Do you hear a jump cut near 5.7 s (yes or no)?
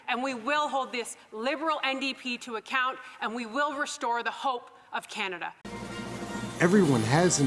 yes